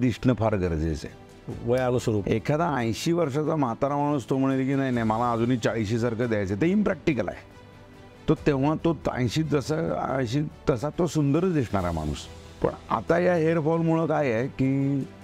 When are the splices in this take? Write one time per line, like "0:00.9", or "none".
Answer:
none